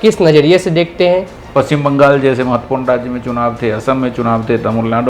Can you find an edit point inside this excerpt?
yes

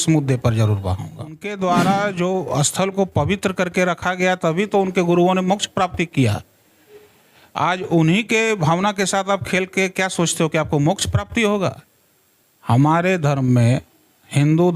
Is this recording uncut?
no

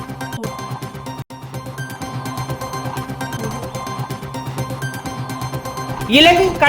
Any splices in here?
no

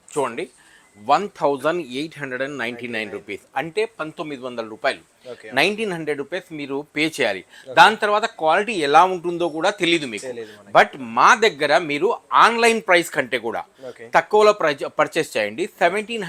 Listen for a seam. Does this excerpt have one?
no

